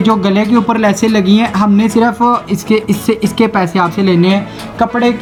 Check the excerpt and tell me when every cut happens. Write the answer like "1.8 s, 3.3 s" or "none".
none